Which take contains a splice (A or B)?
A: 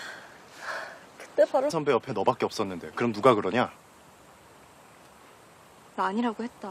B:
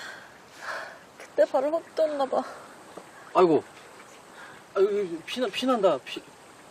B